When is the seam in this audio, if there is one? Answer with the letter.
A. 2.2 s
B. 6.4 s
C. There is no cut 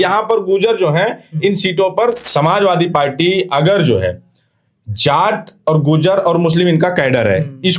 A